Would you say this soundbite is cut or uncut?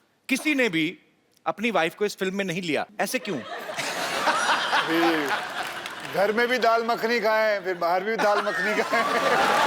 cut